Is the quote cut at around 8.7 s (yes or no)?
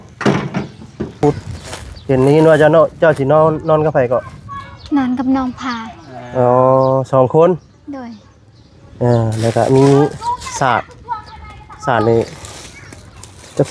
no